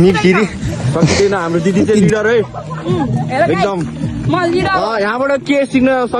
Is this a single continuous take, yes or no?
no